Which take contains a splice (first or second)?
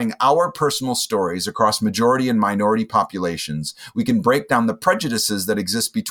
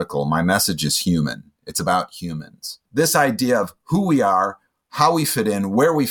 second